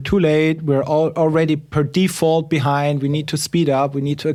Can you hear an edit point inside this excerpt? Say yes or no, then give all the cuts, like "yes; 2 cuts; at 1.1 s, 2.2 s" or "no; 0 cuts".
no; 0 cuts